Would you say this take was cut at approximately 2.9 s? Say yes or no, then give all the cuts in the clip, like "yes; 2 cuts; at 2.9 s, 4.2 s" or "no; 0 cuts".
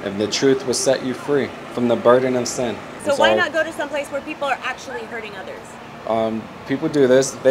yes; 1 cut; at 2.9 s